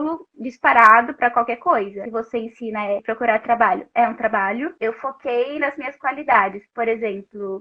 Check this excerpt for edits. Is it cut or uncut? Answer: cut